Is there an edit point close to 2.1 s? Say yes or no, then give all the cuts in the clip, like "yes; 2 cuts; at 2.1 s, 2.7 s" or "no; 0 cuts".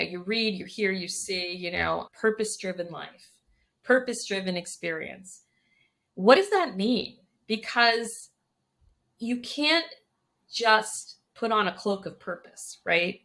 yes; 1 cut; at 2.1 s